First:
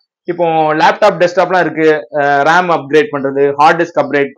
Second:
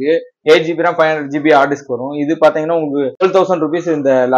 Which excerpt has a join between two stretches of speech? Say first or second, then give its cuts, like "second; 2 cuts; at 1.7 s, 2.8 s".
second; 1 cut; at 3.2 s